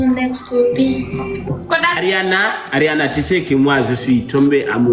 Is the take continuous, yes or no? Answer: no